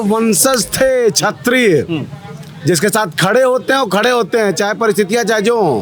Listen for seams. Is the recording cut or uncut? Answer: uncut